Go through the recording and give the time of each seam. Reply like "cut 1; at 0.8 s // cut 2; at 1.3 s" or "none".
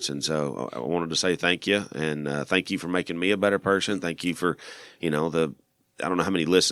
none